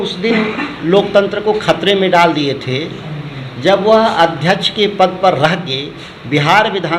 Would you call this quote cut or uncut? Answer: uncut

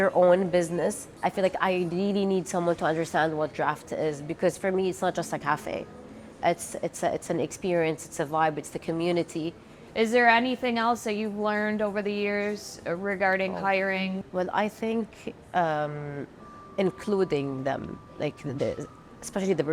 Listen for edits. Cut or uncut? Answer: cut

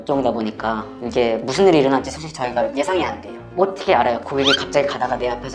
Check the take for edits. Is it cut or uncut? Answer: uncut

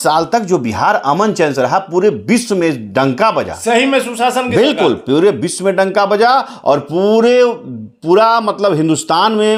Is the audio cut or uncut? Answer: uncut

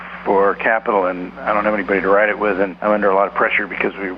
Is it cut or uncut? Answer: cut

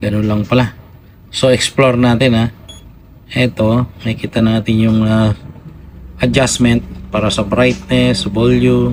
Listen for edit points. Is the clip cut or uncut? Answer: uncut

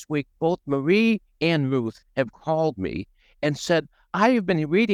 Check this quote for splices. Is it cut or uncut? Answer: uncut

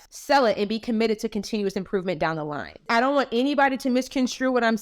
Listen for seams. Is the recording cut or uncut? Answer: cut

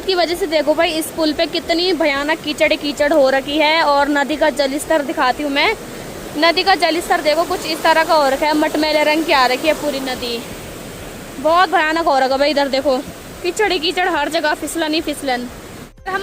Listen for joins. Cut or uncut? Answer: uncut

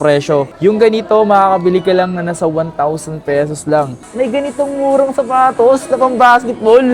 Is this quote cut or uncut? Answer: cut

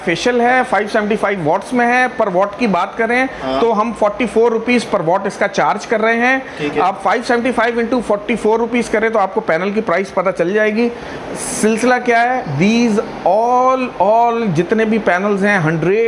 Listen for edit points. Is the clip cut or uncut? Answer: uncut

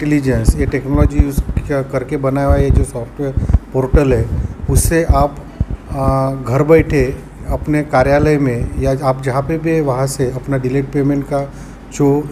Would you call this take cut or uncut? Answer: uncut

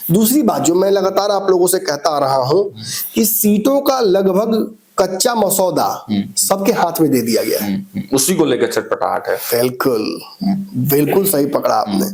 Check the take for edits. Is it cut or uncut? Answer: uncut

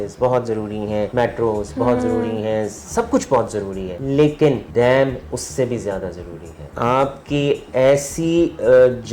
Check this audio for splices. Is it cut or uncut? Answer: cut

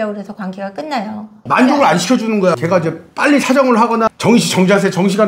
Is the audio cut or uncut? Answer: cut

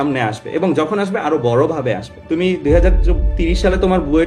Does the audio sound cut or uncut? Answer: cut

